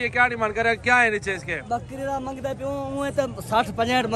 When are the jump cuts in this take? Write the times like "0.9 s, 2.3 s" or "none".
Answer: none